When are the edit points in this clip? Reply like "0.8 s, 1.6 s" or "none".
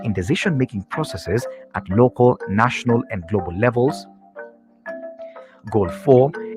none